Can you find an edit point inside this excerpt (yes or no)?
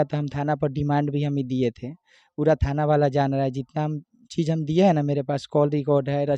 no